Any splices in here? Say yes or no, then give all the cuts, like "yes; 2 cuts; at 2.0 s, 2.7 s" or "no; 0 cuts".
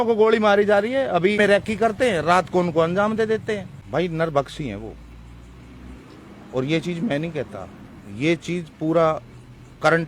yes; 2 cuts; at 1.4 s, 3.7 s